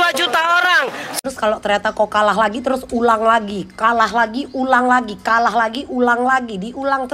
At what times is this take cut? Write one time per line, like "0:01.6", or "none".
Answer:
0:01.2